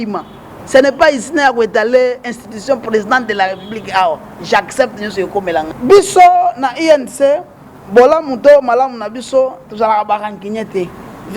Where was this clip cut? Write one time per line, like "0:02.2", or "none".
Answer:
0:05.7